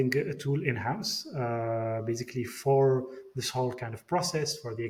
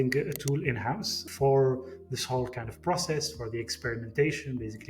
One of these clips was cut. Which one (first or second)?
second